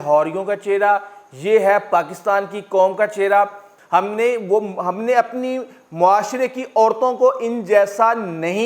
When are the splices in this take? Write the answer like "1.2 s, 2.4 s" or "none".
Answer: 3.7 s